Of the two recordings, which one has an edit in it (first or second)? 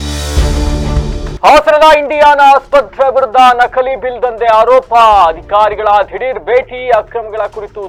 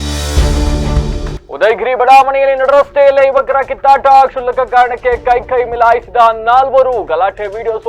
second